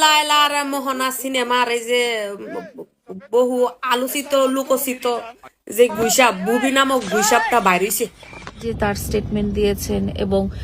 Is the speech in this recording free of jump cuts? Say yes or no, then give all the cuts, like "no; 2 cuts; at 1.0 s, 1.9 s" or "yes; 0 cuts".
no; 1 cut; at 8.7 s